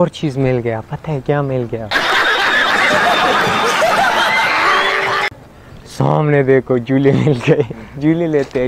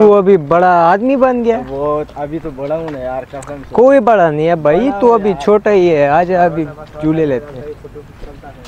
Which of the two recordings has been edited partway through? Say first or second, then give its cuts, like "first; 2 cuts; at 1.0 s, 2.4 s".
first; 3 cuts; at 0.9 s, 1.9 s, 5.4 s